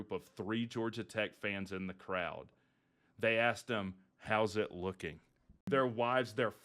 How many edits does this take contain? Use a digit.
1